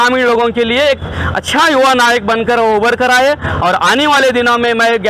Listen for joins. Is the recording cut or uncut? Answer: uncut